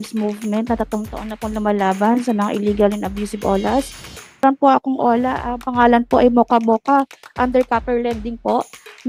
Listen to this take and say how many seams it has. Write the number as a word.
one